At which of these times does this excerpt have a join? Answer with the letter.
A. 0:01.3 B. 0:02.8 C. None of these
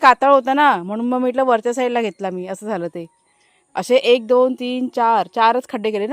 C